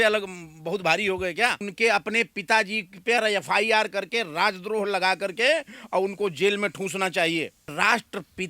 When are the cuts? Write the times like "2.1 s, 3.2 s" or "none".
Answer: 1.7 s, 7.7 s